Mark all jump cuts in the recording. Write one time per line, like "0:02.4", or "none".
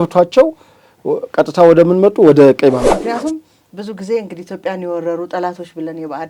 0:02.8